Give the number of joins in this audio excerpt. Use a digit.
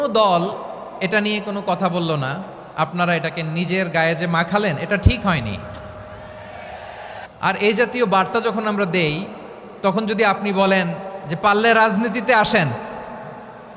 1